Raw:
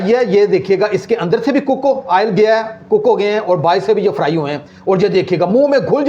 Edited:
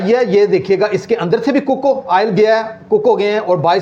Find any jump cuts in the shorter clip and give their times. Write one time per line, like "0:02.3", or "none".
none